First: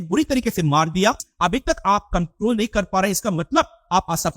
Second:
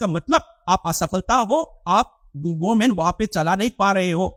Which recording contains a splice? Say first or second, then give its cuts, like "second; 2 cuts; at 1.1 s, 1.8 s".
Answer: first; 1 cut; at 1.3 s